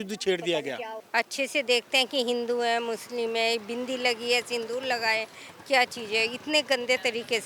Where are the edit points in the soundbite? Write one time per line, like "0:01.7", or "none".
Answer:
0:01.0